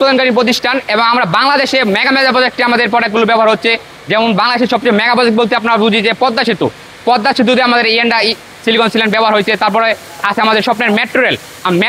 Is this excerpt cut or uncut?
uncut